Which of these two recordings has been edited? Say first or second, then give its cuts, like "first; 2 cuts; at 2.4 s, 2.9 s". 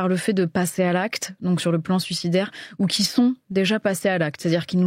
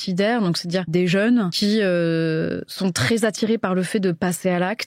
second; 3 cuts; at 0.9 s, 1.5 s, 2.7 s